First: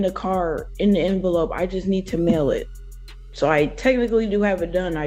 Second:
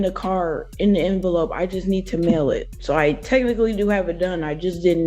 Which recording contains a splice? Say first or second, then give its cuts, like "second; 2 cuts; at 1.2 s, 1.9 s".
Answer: second; 1 cut; at 2.7 s